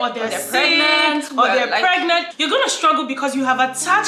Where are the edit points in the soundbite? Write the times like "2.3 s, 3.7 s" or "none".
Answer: 2.3 s